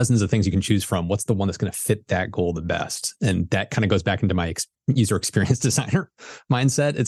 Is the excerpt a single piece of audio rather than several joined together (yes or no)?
yes